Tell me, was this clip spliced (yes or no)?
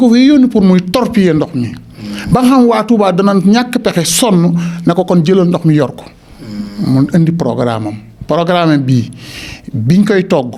no